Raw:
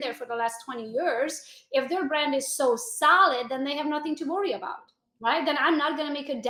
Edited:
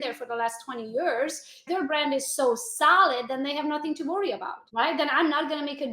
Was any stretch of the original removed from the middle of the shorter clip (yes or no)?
yes